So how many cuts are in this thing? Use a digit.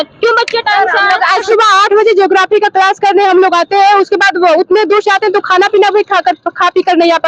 1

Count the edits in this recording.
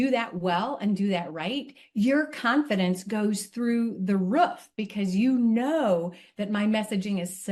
0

